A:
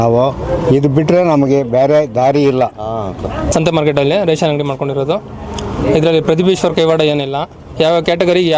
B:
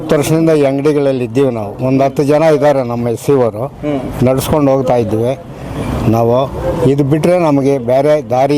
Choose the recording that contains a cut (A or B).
A